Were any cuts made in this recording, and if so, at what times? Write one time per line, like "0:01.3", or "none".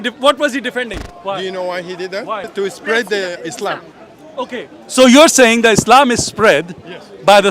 0:01.0
0:02.5